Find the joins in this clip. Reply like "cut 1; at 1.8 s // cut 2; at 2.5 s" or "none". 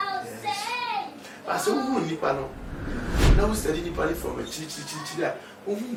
none